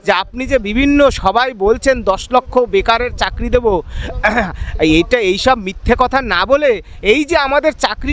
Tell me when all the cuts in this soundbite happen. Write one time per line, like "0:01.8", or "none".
none